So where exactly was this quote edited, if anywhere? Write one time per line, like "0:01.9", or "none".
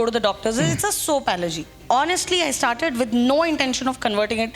0:01.8